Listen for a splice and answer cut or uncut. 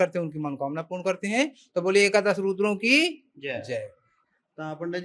uncut